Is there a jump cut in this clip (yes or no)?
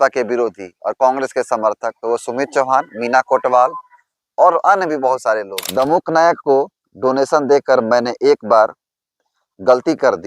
yes